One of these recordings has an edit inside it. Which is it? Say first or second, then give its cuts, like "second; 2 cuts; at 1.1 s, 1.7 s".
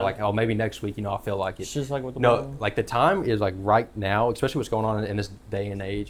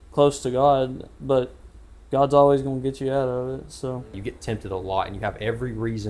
second; 1 cut; at 4.2 s